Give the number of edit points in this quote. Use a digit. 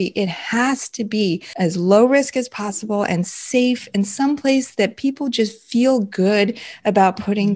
1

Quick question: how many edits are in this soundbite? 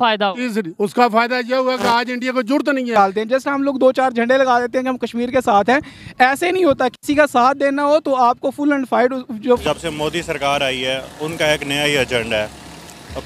2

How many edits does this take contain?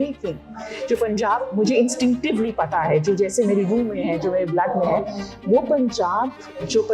0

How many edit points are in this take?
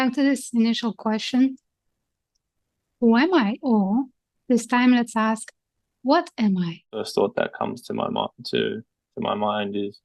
1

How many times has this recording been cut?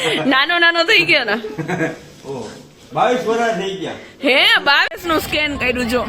1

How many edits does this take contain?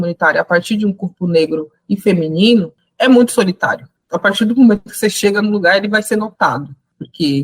1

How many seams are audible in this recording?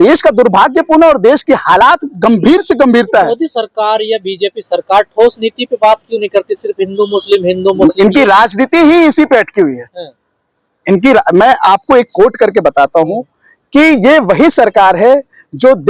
0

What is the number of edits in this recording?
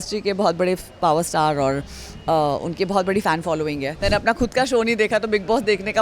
1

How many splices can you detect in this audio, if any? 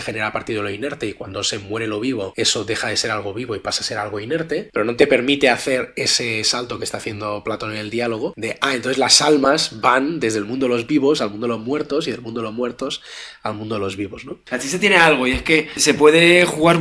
5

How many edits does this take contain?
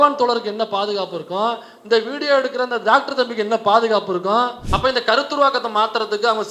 1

